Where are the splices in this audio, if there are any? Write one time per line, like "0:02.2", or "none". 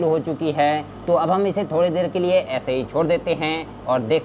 0:00.9